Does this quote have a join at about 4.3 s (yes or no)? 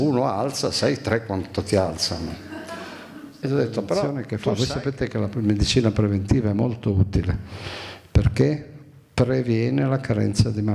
yes